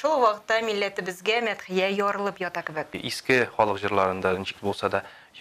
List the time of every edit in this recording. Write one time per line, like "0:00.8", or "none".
0:03.1